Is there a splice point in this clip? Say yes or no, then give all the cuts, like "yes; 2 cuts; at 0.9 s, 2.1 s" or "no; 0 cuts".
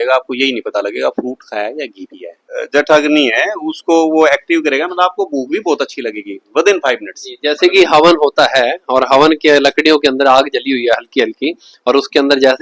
yes; 1 cut; at 2.6 s